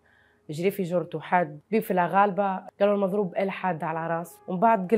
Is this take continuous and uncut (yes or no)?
no